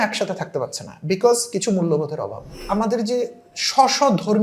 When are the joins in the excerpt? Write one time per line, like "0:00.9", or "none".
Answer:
0:02.6